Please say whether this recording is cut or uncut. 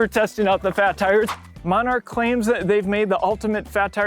cut